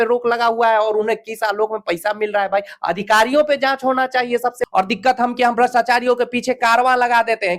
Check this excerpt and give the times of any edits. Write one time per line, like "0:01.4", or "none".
0:04.6